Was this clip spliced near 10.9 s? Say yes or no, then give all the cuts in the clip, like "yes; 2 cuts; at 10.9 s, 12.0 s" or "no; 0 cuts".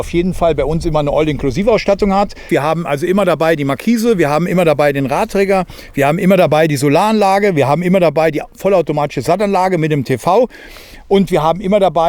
no; 1 cut; at 2.5 s